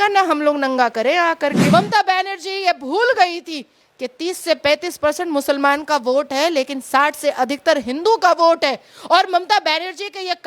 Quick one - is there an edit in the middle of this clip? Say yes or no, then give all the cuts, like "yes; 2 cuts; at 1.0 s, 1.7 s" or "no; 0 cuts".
yes; 1 cut; at 1.6 s